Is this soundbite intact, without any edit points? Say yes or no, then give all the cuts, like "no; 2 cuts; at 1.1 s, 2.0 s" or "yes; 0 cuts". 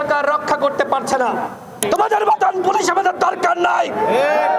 no; 1 cut; at 1.8 s